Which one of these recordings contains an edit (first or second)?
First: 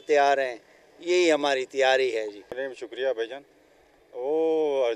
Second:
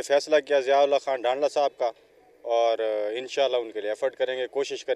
first